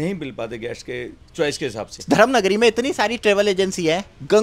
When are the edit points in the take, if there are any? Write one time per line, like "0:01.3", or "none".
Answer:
0:02.0